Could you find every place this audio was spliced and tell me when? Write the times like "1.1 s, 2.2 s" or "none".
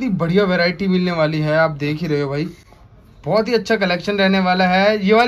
none